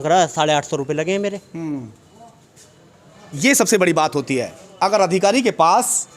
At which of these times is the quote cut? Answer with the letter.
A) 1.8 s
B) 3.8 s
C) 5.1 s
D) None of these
D